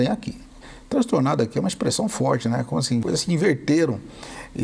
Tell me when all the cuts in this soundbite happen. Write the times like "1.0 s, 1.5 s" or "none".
3.0 s